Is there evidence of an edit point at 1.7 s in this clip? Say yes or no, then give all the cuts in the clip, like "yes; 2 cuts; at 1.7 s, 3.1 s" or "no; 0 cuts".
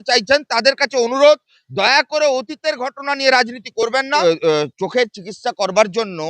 no; 1 cut; at 4.1 s